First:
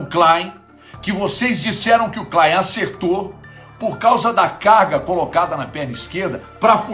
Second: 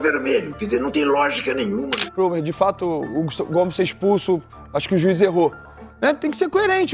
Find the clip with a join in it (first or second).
second